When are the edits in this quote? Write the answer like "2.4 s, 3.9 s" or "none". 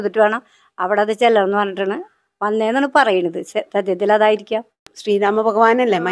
4.9 s